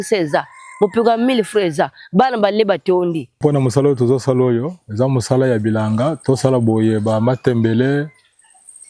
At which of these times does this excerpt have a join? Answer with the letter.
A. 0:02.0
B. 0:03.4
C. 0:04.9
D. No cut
B